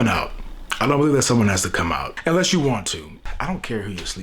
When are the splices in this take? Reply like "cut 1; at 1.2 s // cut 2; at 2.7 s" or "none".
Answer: cut 1; at 2.1 s